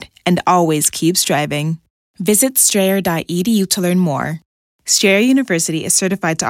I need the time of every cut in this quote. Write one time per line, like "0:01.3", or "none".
none